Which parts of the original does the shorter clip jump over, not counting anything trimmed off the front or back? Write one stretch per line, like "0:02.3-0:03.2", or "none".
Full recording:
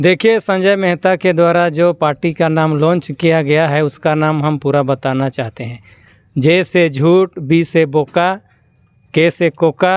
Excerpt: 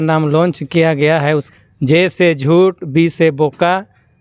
0:04.0-0:06.0